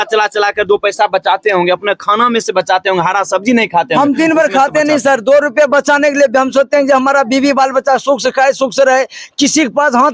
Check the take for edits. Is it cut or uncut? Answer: uncut